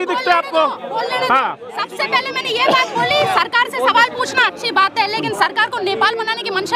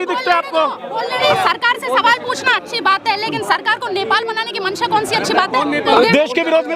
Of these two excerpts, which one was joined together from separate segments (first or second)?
second